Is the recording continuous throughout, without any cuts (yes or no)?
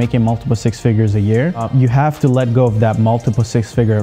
yes